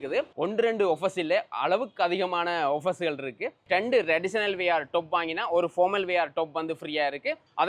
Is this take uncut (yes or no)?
no